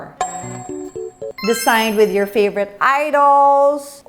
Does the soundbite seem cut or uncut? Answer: cut